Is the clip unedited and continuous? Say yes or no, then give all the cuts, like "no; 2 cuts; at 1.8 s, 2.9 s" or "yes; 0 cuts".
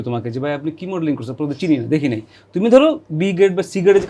yes; 0 cuts